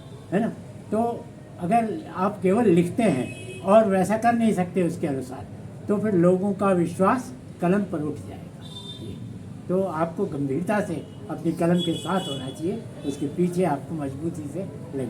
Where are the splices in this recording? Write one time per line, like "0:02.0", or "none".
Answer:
none

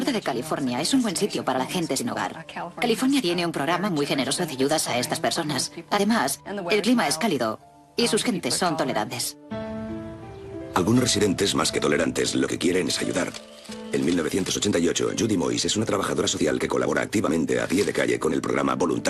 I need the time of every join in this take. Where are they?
0:09.7

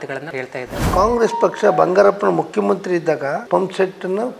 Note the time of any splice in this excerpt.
0:00.8
0:03.4

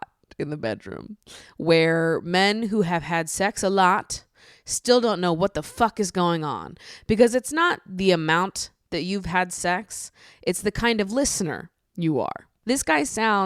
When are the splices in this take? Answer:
0:12.5

